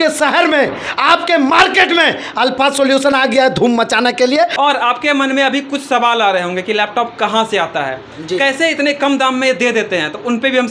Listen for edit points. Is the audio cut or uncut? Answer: cut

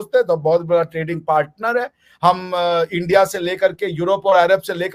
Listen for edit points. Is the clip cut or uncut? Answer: uncut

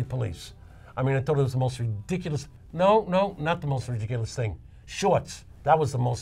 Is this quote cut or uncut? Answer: uncut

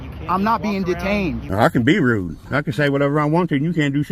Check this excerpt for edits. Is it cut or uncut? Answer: cut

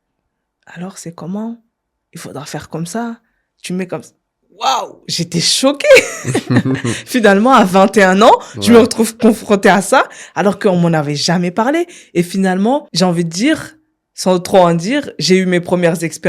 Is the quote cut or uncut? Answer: cut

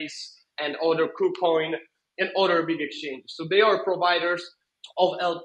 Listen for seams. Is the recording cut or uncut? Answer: uncut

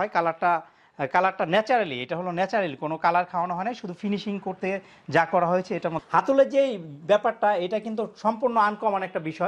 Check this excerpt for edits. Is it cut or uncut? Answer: cut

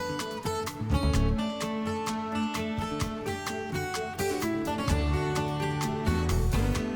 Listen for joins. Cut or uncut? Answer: uncut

